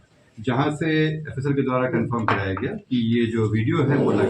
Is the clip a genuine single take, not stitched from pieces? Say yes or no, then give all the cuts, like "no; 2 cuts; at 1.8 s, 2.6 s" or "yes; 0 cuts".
yes; 0 cuts